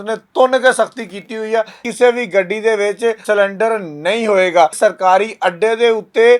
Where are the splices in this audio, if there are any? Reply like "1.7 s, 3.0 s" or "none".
1.8 s, 3.2 s, 4.8 s